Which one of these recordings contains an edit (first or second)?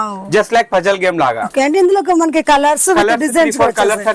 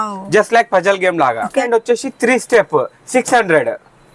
second